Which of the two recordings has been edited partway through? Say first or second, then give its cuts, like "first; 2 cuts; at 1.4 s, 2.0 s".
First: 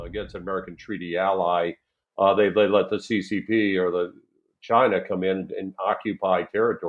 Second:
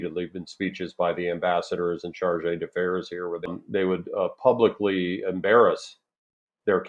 second; 1 cut; at 3.5 s